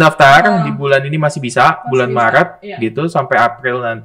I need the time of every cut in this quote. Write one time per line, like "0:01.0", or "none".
none